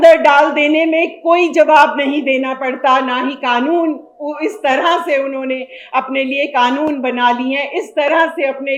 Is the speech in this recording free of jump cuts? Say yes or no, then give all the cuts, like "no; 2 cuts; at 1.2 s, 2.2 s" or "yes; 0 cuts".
yes; 0 cuts